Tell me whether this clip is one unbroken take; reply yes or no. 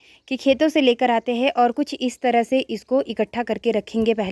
yes